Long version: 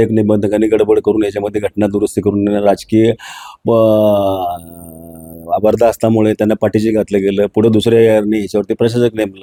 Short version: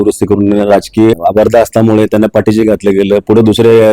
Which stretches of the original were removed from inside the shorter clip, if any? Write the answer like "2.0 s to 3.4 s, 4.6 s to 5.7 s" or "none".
3.1 s to 5.4 s